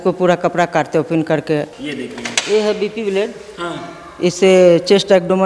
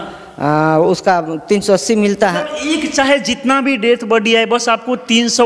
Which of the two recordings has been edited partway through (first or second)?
first